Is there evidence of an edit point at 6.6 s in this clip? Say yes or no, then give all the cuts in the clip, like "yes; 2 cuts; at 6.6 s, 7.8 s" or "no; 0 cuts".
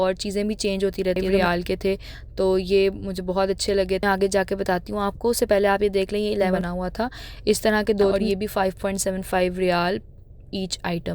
yes; 4 cuts; at 1.3 s, 4.0 s, 6.6 s, 8.2 s